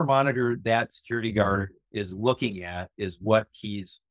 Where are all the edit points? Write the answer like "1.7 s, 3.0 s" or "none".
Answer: none